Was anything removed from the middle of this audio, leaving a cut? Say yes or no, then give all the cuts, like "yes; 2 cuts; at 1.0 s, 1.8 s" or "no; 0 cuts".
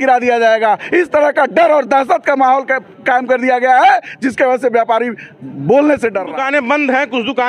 yes; 1 cut; at 6.3 s